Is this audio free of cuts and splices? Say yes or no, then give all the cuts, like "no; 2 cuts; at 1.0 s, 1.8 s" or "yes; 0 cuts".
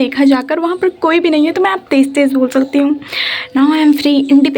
yes; 0 cuts